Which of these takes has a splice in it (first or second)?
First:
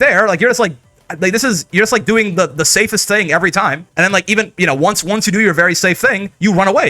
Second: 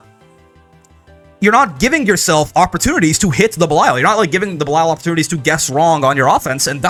first